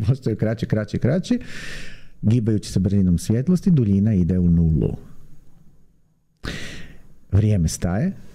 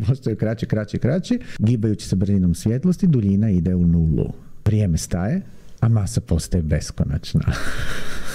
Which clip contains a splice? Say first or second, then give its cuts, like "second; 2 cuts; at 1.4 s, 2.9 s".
second; 2 cuts; at 1.5 s, 4.5 s